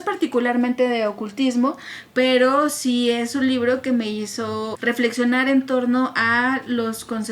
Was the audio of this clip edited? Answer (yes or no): yes